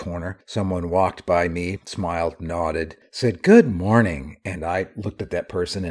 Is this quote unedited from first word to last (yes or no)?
no